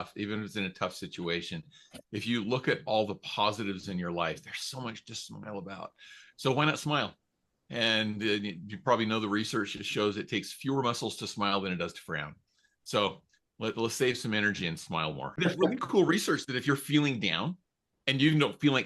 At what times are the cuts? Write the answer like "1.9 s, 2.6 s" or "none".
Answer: 15.4 s